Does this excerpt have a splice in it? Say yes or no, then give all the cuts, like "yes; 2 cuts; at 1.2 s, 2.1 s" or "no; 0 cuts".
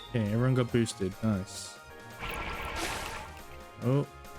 yes; 1 cut; at 1.9 s